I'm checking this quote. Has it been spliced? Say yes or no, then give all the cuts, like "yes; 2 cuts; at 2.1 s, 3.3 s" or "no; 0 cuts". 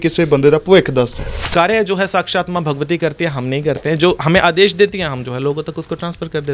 yes; 1 cut; at 1.3 s